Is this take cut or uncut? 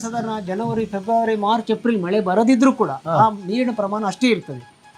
uncut